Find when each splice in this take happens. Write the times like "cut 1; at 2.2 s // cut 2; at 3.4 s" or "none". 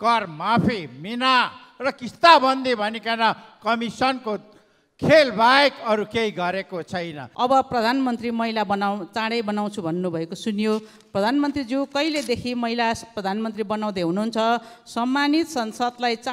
cut 1; at 7.2 s

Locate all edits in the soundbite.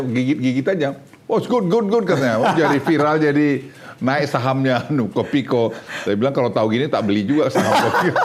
none

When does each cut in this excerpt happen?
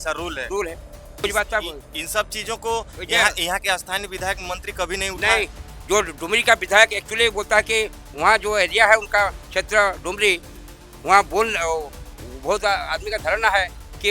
cut 1; at 1.2 s

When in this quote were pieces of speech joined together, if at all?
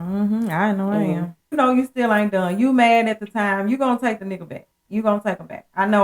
cut 1; at 1.5 s

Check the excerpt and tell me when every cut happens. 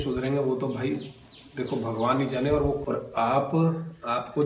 cut 1; at 2.8 s

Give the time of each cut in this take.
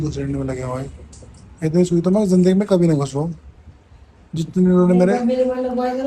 none

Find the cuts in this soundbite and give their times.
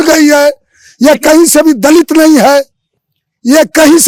none

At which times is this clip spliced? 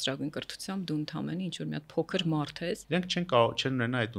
cut 1; at 2.8 s

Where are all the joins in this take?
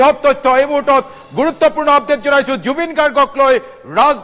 cut 1; at 1.2 s

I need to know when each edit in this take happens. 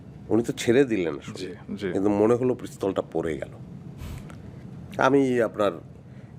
cut 1; at 4.6 s

